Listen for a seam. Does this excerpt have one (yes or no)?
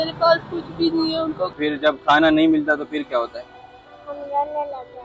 yes